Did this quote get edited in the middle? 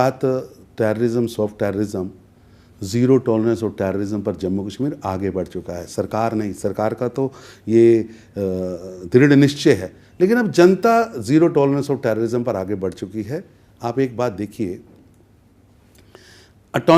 no; 0 cuts

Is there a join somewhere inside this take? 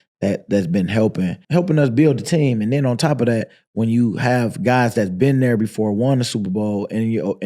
yes; 1 cut; at 1.4 s

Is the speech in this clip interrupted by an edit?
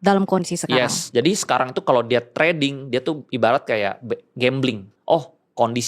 yes; 1 cut; at 4.9 s

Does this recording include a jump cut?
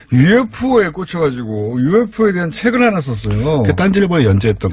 yes; 1 cut; at 2.1 s

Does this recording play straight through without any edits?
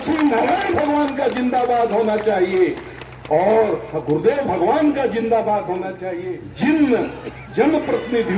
no; 1 cut; at 6.0 s

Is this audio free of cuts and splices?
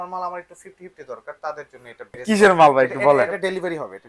no; 1 cut; at 2.2 s

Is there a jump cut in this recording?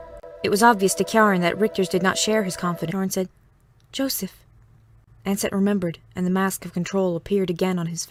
no; 0 cuts

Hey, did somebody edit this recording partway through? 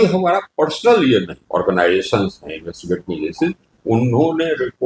yes; 1 cut; at 1.4 s

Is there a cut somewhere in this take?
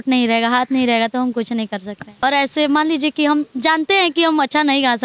yes; 1 cut; at 2.0 s

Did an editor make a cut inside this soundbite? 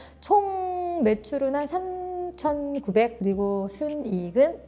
yes; 1 cut; at 3.2 s

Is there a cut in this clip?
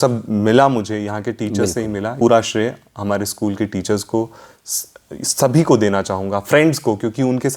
yes; 1 cut; at 2.1 s

